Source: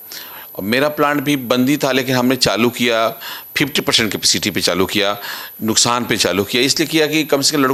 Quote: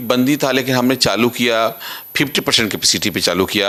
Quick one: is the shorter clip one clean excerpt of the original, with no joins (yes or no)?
yes